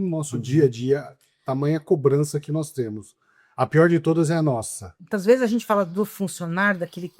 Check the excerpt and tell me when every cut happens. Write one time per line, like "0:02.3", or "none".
0:05.0